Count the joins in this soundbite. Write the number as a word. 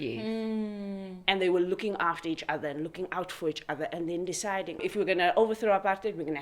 one